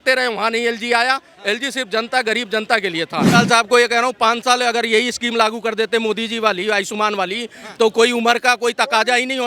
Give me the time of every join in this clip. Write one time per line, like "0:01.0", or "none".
0:03.3